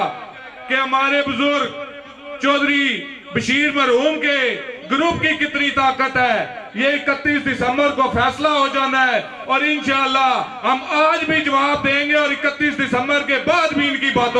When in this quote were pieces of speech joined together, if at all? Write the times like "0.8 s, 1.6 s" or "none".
none